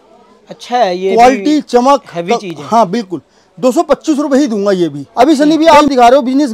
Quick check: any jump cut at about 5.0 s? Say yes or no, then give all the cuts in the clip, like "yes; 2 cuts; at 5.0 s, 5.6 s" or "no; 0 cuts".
yes; 1 cut; at 5.0 s